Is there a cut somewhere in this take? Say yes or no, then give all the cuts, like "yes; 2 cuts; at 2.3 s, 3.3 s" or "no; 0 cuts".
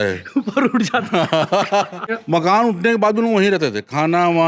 yes; 1 cut; at 2.1 s